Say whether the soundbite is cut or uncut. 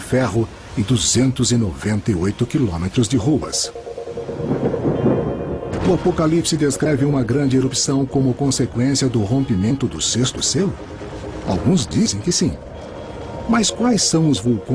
cut